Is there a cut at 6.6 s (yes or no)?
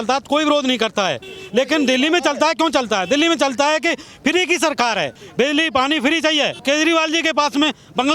yes